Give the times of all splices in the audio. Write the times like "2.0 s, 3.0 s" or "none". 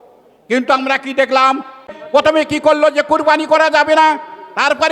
2.0 s

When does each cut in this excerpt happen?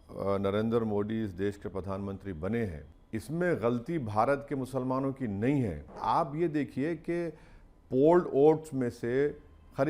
2.9 s, 6.0 s

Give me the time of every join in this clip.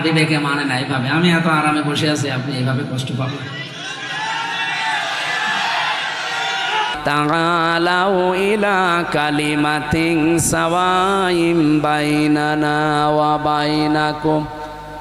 7.0 s

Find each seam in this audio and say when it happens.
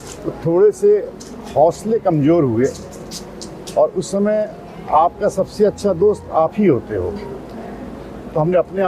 none

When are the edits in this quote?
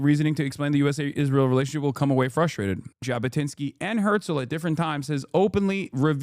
2.8 s

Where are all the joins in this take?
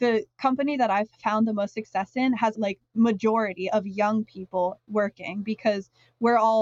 2.5 s

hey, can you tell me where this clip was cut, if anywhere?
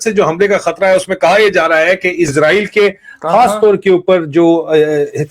2.3 s

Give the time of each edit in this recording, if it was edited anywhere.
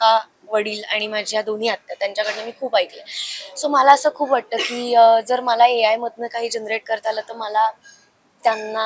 none

